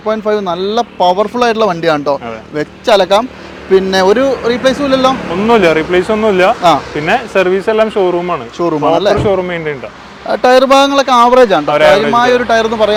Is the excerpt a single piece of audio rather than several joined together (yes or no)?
yes